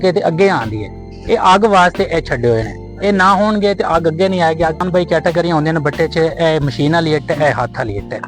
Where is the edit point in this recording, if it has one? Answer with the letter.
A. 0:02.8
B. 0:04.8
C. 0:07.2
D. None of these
B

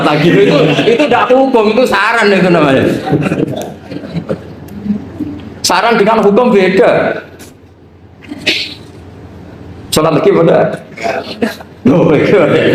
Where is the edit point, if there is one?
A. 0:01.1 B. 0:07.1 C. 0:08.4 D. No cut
D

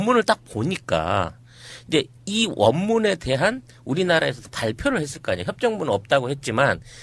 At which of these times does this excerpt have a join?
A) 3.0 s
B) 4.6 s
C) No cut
A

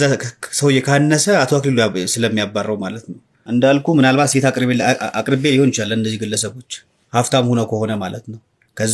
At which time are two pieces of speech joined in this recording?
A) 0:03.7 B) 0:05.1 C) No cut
A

